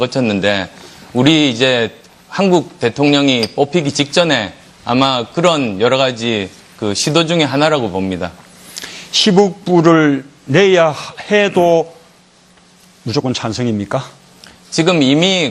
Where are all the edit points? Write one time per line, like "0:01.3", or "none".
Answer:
0:10.9

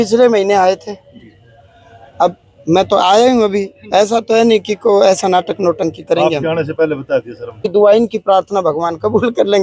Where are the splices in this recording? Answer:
0:07.6

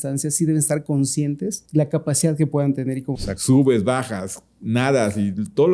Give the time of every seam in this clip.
0:01.6
0:03.1

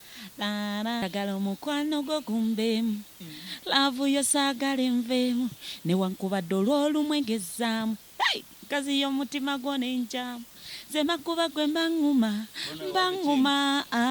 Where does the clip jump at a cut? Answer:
0:01.0

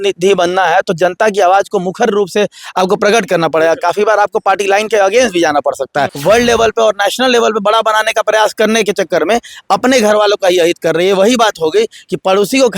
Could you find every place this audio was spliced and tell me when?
0:06.1

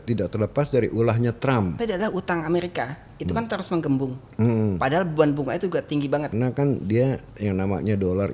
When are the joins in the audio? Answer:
0:01.8
0:06.3

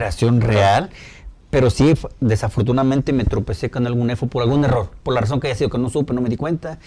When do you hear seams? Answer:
none

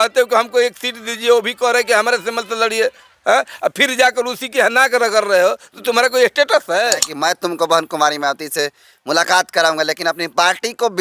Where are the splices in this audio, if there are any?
0:07.1

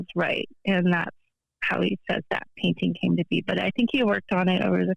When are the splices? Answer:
none

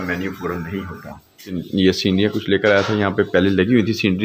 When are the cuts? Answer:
0:01.6

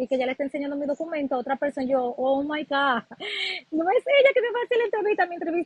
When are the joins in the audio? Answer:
none

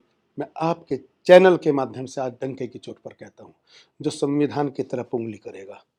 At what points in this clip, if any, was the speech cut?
none

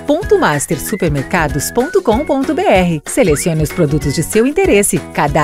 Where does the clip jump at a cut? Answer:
none

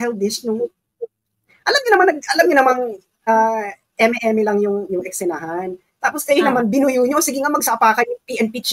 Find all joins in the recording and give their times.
none

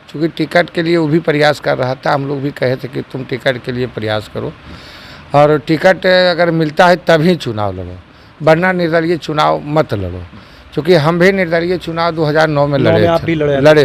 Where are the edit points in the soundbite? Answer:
none

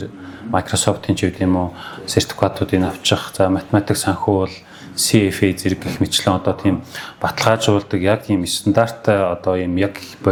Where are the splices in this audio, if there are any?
none

